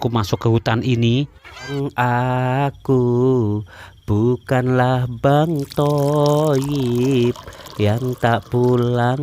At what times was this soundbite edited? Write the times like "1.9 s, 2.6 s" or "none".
1.7 s